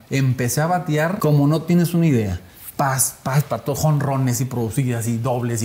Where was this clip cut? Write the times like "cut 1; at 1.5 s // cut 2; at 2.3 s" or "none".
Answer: cut 1; at 1.2 s